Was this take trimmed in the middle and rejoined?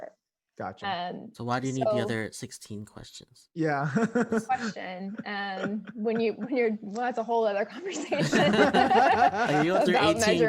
no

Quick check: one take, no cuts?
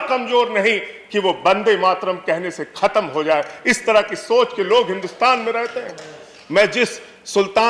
yes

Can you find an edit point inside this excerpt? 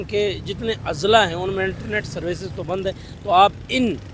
no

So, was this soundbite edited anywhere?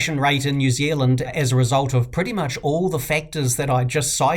yes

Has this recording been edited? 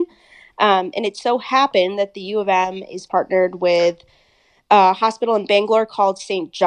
no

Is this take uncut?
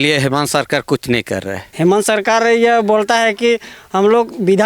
no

